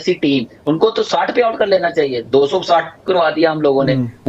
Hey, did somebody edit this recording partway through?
no; 0 cuts

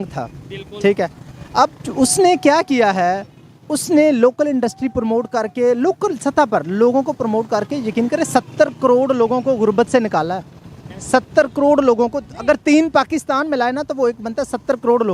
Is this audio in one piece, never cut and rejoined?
yes; 0 cuts

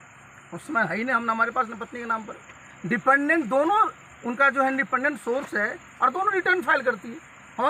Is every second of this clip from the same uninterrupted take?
yes; 0 cuts

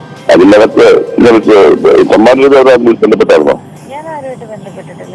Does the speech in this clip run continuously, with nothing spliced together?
yes; 0 cuts

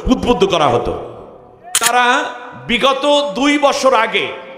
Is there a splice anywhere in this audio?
yes; 1 cut; at 1.9 s

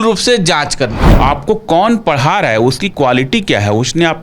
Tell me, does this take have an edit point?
yes; 1 cut; at 1.0 s

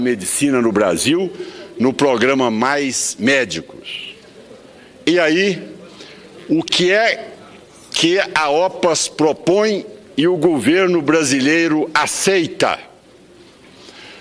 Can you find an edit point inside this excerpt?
no; 0 cuts

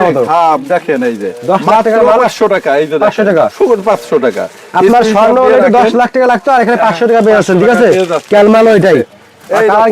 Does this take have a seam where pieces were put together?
no; 0 cuts

